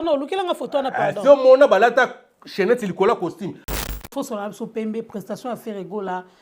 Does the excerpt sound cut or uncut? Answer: cut